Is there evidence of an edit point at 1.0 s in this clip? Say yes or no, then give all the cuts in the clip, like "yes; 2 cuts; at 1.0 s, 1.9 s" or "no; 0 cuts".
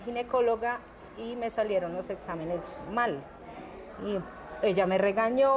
no; 0 cuts